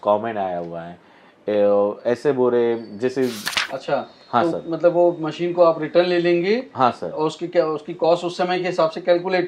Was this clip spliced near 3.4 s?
yes; 1 cut; at 3.4 s

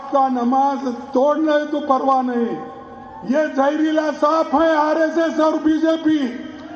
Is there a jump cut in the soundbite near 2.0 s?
yes; 1 cut; at 2.0 s

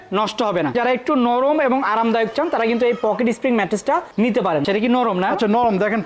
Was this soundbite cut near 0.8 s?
yes; 2 cuts; at 0.8 s, 4.6 s

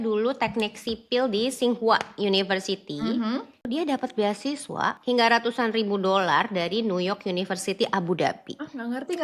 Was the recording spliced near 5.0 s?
yes; 2 cuts; at 3.7 s, 5.0 s

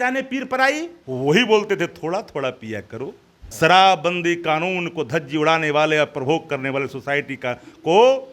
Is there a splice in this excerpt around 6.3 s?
no; 2 cuts; at 1.0 s, 3.4 s

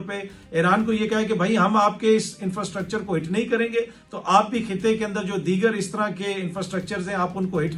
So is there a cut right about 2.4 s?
no; 0 cuts

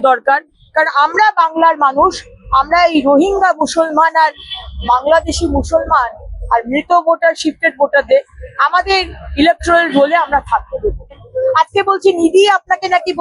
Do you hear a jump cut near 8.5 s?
no; 1 cut; at 11.3 s

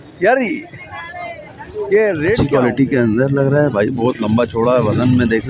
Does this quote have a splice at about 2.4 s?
yes; 1 cut; at 2.4 s

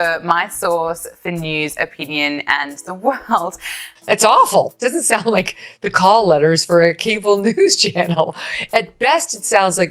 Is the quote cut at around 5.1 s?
no; 1 cut; at 3.6 s

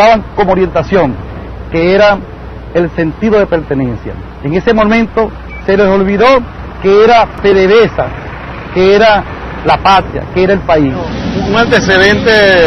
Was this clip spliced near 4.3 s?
yes; 1 cut; at 4.3 s

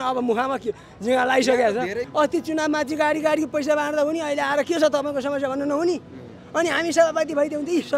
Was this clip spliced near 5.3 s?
no; 1 cut; at 2.0 s

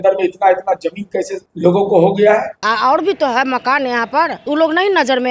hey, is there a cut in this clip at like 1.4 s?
yes; 3 cuts; at 1.4 s, 2.6 s, 4.4 s

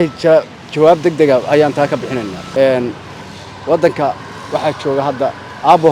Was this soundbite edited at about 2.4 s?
yes; 1 cut; at 2.4 s

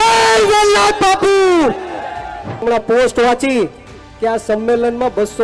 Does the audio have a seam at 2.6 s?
yes; 1 cut; at 2.6 s

